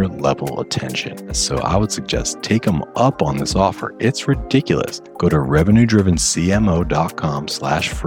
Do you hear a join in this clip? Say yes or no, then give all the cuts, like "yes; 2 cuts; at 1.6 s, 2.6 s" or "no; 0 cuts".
yes; 2 cuts; at 1.4 s, 5.0 s